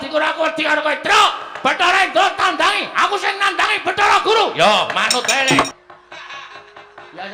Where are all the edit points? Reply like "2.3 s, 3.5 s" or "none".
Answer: 5.8 s